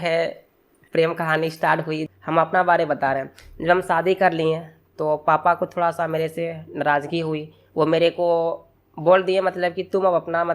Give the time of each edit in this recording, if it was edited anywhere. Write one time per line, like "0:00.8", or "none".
0:02.1